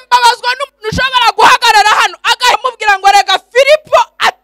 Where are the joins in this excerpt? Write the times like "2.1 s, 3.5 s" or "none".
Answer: 2.6 s